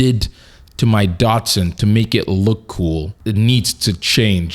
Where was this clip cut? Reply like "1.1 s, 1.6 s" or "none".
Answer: 3.1 s